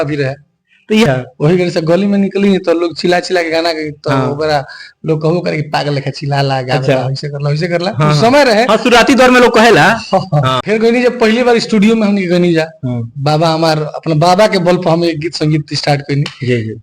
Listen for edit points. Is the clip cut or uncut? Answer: cut